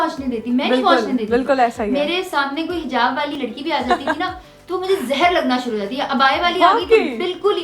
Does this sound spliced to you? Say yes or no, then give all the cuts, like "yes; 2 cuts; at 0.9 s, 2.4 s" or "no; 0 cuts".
yes; 1 cut; at 3.4 s